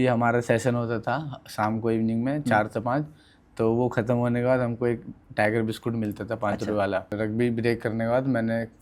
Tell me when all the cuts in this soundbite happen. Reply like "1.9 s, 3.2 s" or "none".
7.1 s